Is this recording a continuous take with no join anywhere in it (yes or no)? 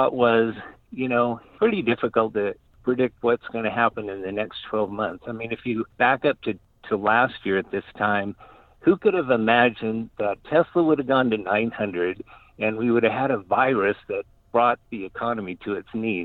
yes